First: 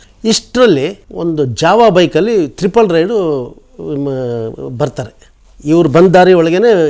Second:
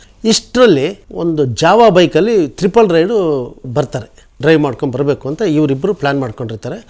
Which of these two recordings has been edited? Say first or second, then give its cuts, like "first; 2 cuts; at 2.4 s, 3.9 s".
second; 1 cut; at 3.8 s